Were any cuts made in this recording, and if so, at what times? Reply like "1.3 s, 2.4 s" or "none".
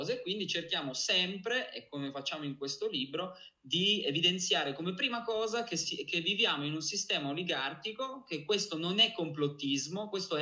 none